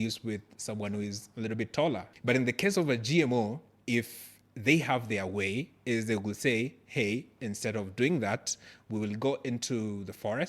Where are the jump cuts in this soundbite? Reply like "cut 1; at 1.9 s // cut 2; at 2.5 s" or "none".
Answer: cut 1; at 2.1 s

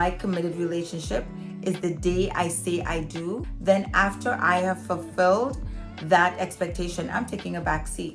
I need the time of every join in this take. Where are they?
cut 1; at 3.5 s

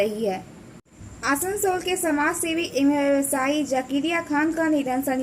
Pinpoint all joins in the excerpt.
cut 1; at 0.9 s

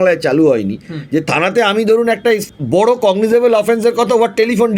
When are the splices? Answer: cut 1; at 2.5 s

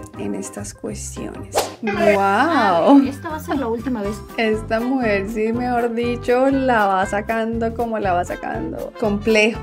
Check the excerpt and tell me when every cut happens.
cut 1; at 1.6 s

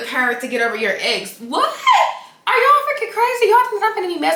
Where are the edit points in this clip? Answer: none

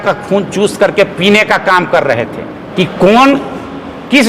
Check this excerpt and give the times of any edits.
cut 1; at 2.6 s

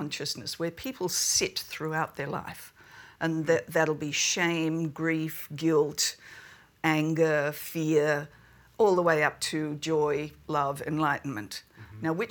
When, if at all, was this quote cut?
none

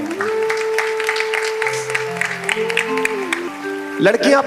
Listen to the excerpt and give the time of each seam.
cut 1; at 3.5 s

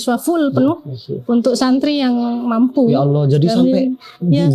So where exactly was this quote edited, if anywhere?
none

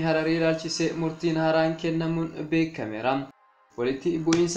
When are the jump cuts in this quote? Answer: cut 1; at 3.5 s

